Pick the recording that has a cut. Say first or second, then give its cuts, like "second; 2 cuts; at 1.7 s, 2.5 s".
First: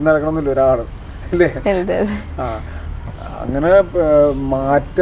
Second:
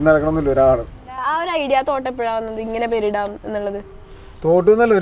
second; 1 cut; at 1.3 s